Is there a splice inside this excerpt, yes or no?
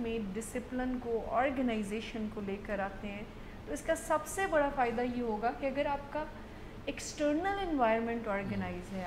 no